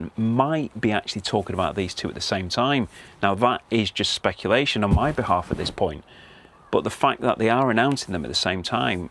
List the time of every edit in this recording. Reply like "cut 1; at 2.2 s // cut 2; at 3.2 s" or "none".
none